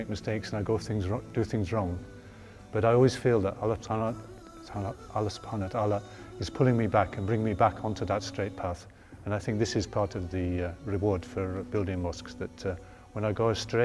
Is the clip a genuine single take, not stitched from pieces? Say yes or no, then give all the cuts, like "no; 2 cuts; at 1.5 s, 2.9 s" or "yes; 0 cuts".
yes; 0 cuts